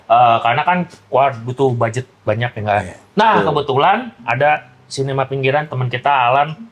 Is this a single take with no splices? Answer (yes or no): yes